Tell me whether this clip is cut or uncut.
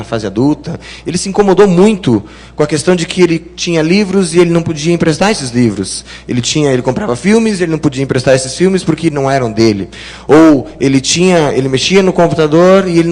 cut